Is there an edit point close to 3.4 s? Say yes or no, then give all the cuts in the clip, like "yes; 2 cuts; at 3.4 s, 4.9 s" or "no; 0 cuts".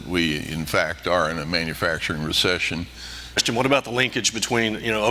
yes; 1 cut; at 3.4 s